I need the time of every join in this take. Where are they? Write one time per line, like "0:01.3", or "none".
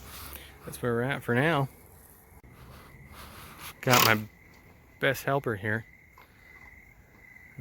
0:02.4